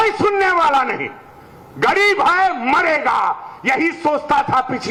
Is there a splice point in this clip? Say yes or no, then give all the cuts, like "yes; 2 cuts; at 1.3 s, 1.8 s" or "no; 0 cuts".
no; 0 cuts